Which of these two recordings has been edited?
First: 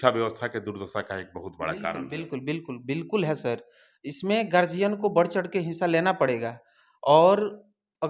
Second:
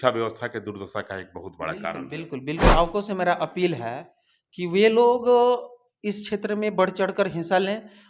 second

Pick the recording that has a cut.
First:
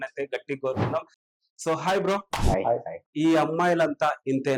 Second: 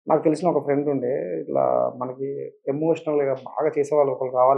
first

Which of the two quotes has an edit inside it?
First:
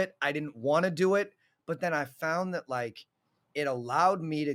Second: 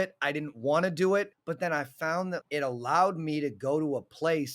second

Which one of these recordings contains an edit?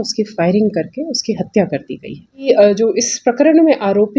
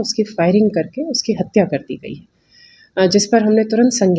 first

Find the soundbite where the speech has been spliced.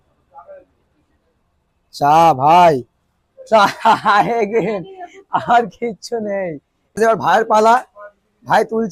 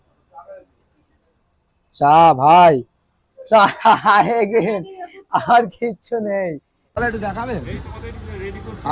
second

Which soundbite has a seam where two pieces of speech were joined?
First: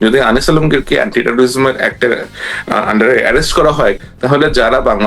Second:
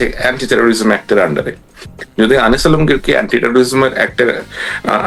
first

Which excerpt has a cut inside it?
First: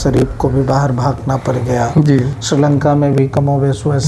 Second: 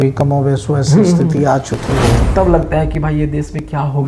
second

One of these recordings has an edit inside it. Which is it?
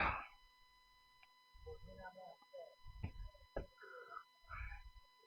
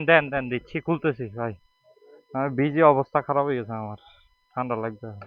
first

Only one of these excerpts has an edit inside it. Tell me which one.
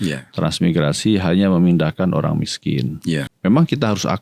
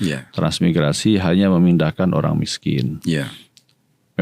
first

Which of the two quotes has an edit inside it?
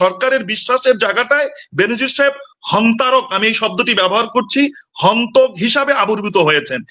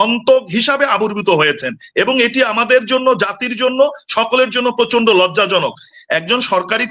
second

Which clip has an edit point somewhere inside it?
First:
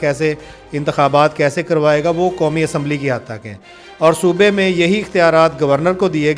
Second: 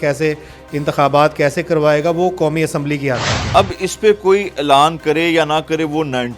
second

